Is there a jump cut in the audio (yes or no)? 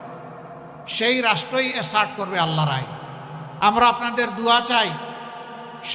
yes